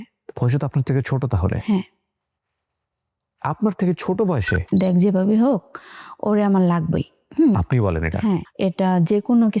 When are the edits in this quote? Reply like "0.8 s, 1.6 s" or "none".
4.7 s, 8.5 s